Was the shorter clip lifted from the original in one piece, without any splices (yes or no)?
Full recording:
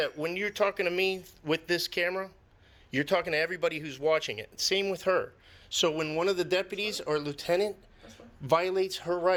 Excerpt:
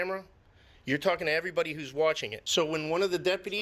no